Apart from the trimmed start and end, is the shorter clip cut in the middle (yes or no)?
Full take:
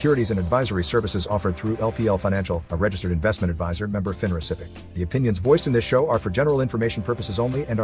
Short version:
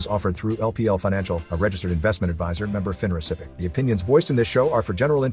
yes